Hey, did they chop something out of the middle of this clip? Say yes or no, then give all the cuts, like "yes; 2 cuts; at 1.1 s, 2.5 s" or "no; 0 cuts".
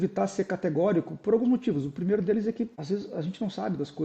yes; 1 cut; at 2.8 s